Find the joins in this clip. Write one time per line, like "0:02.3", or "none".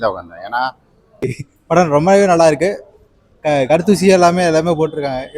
0:01.4